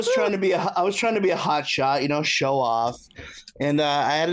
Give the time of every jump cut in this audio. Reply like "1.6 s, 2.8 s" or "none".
none